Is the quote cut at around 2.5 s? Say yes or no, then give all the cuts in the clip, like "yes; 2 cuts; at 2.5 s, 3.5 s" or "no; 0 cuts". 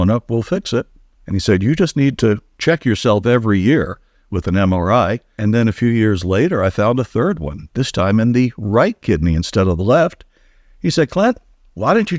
yes; 2 cuts; at 2.5 s, 5.3 s